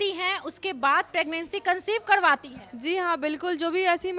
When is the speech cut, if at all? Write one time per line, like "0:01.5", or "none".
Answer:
none